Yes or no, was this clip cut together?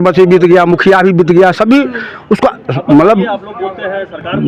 no